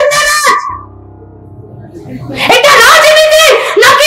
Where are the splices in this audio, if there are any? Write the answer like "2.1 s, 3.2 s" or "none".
none